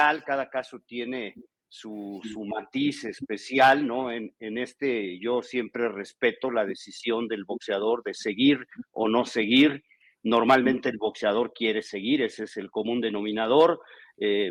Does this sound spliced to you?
no; 0 cuts

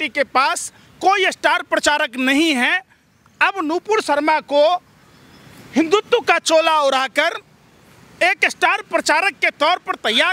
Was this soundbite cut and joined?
no; 0 cuts

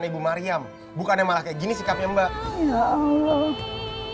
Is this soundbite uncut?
no; 1 cut; at 2.4 s

